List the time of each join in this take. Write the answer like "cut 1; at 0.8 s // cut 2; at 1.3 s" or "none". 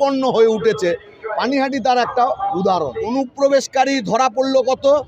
cut 1; at 3.1 s